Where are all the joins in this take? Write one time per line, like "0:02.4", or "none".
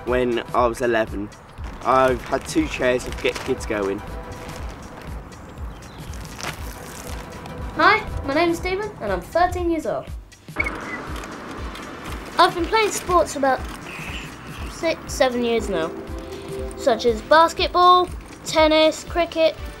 0:07.4